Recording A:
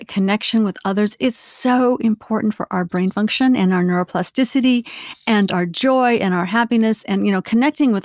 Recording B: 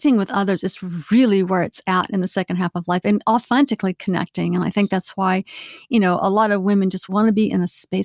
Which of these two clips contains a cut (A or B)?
B